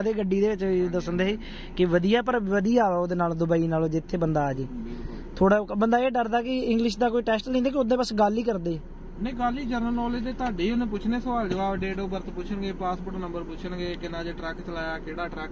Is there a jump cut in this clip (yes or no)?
no